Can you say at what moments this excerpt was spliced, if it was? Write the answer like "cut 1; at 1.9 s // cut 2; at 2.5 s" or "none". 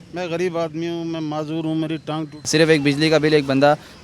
cut 1; at 2.4 s